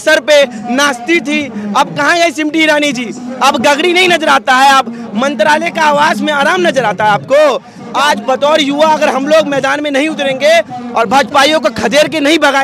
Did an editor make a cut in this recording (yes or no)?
yes